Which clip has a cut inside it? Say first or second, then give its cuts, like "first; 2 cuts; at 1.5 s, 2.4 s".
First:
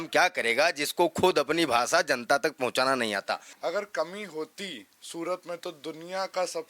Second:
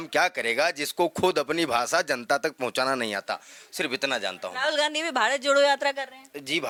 first; 1 cut; at 3.5 s